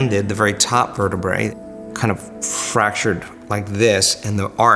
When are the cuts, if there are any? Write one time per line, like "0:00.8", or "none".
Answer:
0:01.6